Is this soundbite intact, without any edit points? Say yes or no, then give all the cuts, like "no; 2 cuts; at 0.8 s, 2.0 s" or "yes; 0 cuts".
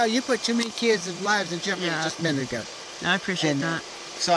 yes; 0 cuts